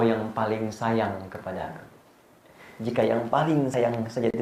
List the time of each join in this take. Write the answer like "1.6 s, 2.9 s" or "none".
none

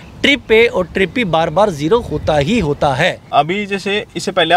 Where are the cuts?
3.2 s

